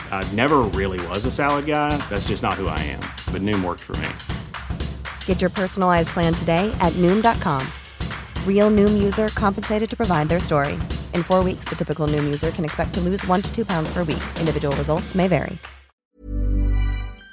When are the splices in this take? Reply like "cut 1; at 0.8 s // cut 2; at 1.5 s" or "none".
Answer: cut 1; at 16.0 s